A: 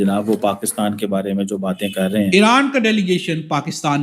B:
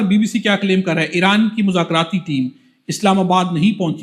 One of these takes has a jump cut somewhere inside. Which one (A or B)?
A